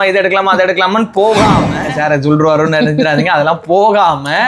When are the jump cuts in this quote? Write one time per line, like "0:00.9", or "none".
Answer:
0:01.7